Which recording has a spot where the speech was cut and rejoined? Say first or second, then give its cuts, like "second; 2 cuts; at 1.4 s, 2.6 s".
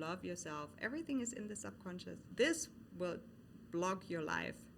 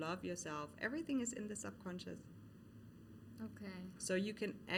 first; 1 cut; at 2.3 s